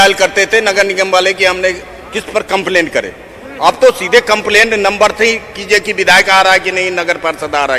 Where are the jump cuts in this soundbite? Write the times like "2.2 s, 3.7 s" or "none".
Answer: none